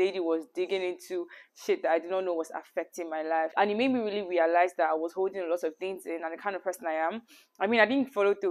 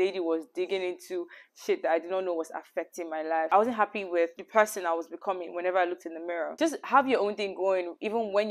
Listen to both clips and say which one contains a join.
second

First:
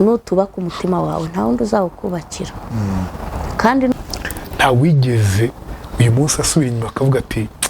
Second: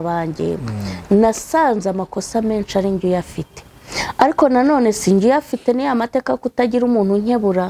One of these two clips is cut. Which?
first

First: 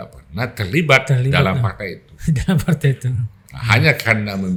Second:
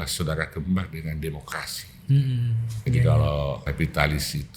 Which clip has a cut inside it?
second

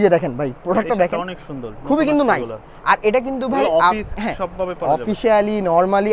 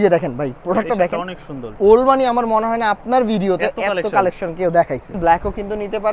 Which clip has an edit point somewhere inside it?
second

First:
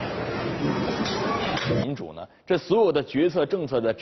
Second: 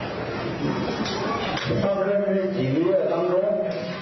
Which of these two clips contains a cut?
second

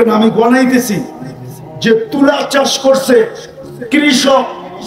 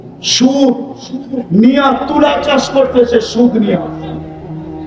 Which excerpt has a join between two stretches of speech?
second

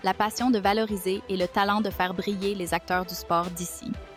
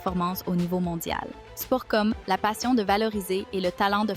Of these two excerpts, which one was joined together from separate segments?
second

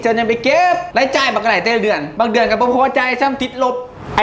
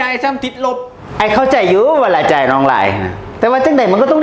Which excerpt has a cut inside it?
first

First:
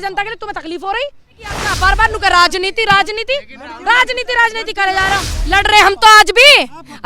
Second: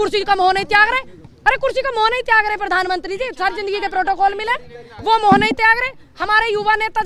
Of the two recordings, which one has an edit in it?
first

